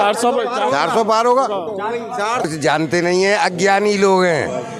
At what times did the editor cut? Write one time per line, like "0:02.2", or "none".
0:02.5